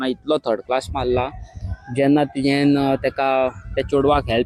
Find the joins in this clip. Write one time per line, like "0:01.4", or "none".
none